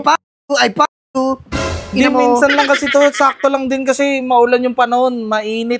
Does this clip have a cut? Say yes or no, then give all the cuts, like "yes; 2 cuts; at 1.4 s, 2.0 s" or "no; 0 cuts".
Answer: no; 0 cuts